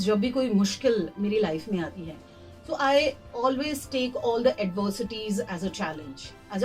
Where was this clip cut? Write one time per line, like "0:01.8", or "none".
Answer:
none